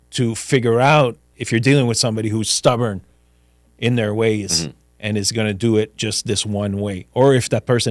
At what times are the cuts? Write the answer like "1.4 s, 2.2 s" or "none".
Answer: 1.3 s